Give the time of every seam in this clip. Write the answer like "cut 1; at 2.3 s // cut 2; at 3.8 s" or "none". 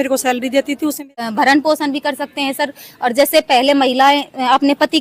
cut 1; at 1.1 s